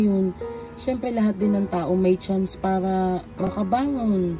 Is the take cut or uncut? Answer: cut